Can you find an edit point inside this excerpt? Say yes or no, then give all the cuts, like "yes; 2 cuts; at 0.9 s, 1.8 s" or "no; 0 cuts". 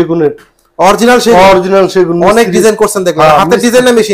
no; 0 cuts